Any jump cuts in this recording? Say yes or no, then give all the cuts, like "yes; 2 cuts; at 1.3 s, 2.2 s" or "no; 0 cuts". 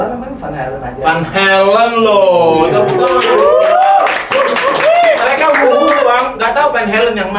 no; 0 cuts